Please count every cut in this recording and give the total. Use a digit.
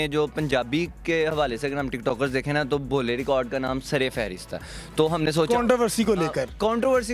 0